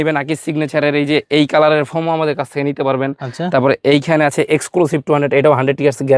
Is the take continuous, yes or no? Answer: yes